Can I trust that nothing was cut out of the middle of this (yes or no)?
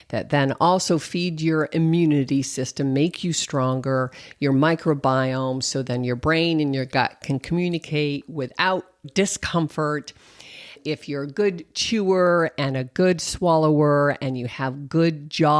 yes